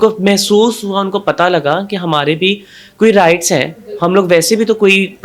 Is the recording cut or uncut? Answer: uncut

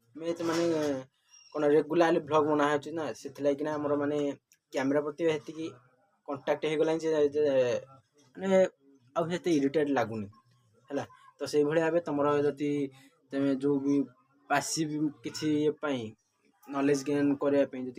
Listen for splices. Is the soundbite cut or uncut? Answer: uncut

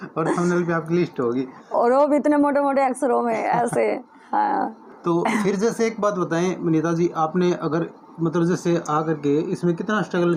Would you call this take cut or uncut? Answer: uncut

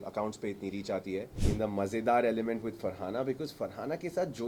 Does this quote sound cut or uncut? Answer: cut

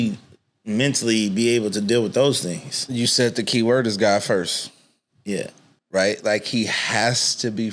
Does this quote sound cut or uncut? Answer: uncut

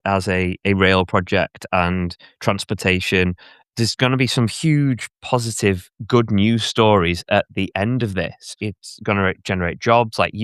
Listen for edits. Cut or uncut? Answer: cut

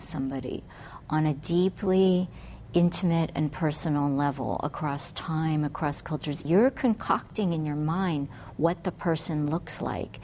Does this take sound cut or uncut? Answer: cut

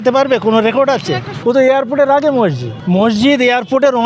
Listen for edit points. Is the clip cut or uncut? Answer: cut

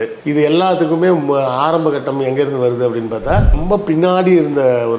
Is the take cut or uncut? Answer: cut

